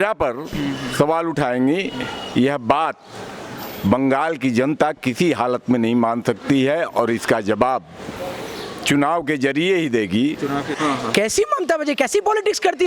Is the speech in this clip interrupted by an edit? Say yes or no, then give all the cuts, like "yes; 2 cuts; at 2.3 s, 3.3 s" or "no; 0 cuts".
yes; 1 cut; at 10.7 s